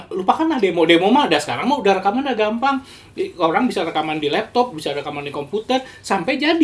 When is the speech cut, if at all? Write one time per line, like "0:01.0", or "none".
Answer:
none